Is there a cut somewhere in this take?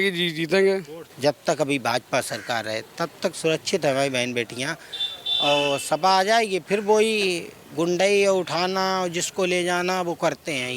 yes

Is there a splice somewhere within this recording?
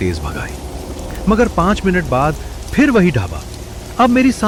no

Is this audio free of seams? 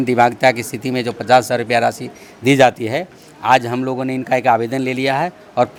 yes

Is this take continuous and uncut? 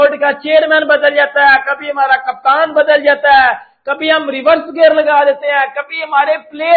yes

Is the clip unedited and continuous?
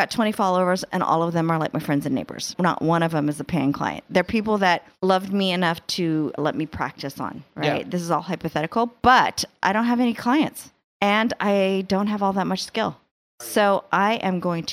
no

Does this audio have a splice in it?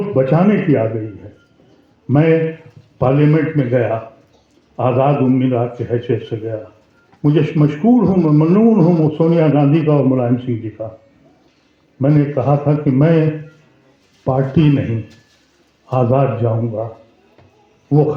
no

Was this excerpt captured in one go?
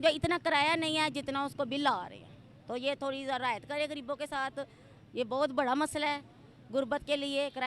yes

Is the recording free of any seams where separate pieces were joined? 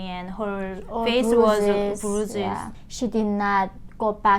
no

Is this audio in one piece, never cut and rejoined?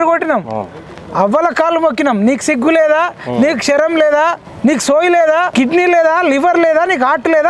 no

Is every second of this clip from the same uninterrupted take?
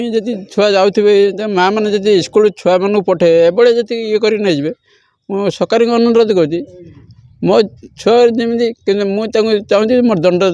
yes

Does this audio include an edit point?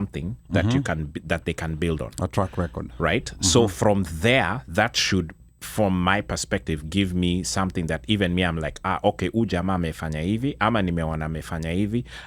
no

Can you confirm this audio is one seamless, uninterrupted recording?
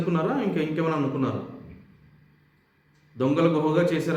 yes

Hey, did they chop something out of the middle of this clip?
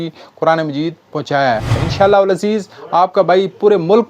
yes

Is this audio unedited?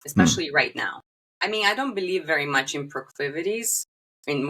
no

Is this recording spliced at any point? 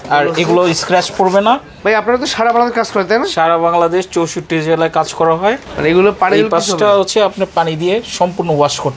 yes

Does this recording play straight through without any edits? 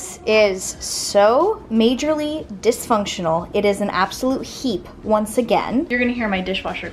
yes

